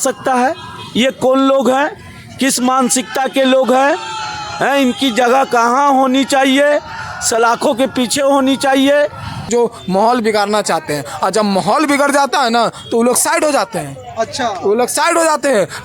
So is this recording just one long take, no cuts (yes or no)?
no